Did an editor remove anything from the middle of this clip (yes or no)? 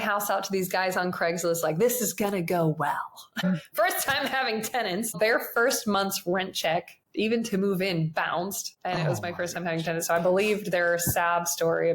yes